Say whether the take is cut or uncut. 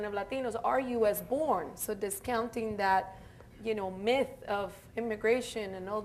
cut